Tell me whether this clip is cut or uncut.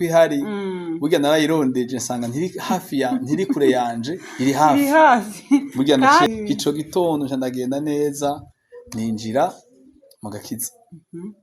cut